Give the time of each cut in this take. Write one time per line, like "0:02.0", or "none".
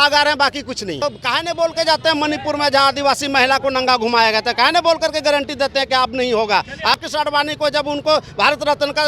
0:01.0
0:06.9